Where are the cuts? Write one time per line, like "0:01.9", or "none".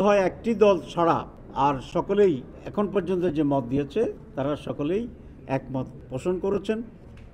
0:01.4
0:02.6
0:04.2
0:06.0